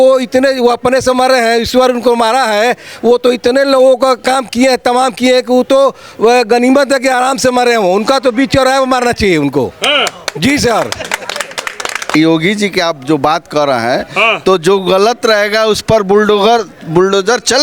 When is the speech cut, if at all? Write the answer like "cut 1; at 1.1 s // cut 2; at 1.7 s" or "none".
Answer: cut 1; at 12.1 s